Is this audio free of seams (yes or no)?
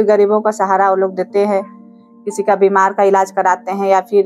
yes